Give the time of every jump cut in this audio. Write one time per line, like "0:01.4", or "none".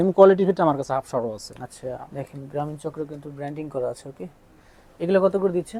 0:02.1